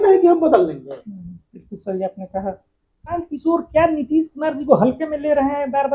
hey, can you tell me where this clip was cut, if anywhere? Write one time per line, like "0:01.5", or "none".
0:03.1